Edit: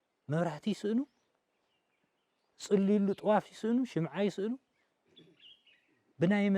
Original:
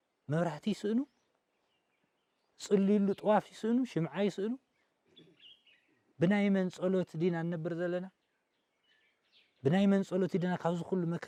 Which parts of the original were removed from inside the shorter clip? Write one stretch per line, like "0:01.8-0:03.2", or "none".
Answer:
none